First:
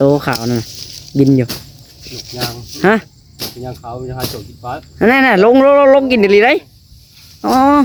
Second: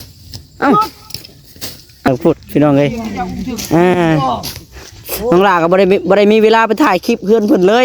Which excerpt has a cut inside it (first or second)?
second